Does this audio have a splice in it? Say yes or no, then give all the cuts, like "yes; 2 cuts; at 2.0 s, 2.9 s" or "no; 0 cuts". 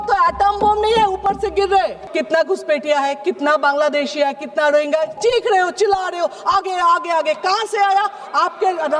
yes; 1 cut; at 2.1 s